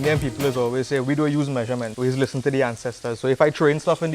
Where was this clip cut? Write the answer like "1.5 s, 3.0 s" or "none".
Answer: 1.9 s